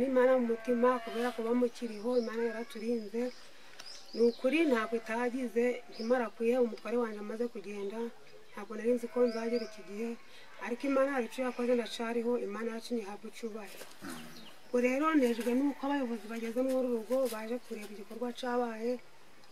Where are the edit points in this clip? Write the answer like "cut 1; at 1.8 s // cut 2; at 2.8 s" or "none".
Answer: none